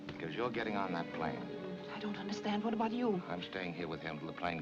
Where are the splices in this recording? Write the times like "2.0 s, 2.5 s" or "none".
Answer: 1.7 s, 3.5 s